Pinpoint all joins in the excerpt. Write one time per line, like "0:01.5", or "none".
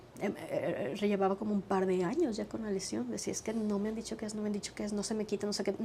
none

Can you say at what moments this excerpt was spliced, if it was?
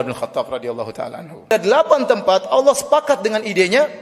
0:01.5

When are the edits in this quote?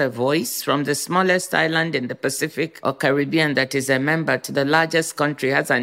0:02.8

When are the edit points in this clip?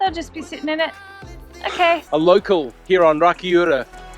0:02.0

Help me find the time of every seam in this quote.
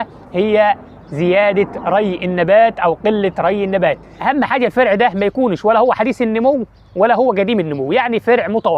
0:04.1

